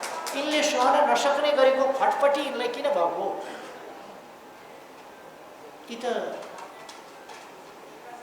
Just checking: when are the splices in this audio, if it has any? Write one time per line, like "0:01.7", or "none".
none